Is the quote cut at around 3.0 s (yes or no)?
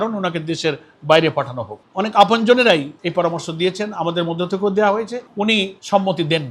no